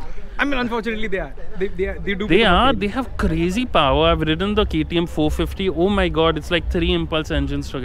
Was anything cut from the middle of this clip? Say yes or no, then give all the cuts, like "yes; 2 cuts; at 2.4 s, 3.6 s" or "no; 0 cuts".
no; 0 cuts